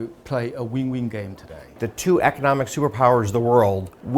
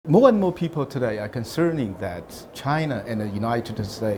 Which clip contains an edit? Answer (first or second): first